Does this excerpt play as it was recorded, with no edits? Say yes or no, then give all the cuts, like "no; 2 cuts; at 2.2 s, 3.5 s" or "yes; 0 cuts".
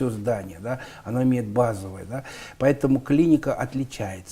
yes; 0 cuts